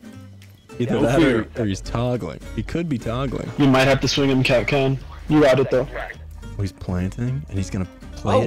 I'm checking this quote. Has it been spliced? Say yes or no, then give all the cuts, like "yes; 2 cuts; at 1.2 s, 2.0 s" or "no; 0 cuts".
no; 0 cuts